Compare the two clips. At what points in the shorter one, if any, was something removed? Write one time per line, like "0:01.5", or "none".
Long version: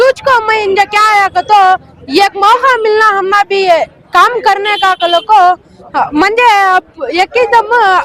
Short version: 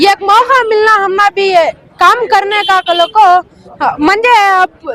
none